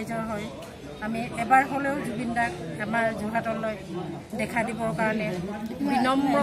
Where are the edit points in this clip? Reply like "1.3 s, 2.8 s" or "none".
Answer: none